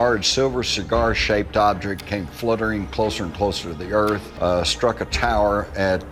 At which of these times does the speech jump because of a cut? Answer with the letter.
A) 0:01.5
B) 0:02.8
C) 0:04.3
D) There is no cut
C